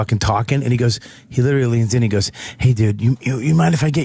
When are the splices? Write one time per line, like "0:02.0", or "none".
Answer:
0:02.2

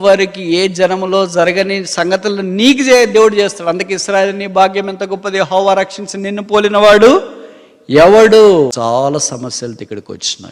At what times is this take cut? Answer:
0:08.7

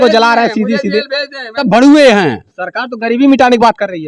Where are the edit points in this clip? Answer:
0:01.6

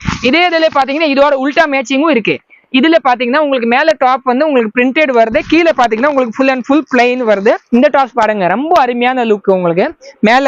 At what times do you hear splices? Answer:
0:07.6

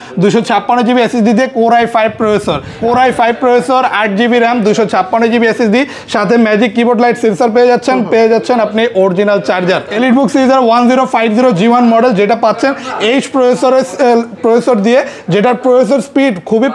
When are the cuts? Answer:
0:02.7
0:09.9

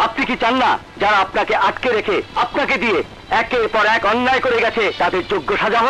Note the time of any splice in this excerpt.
0:00.9
0:02.3
0:04.9

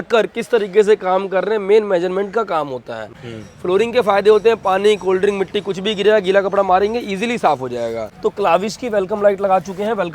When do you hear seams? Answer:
0:03.3
0:08.0

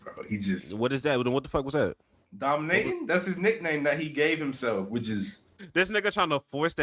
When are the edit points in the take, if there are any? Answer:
0:05.6

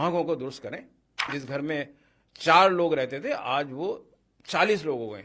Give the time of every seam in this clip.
0:01.4

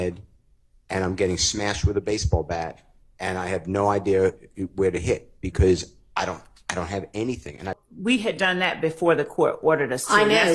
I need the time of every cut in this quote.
0:07.8

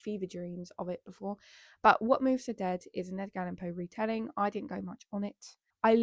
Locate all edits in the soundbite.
none

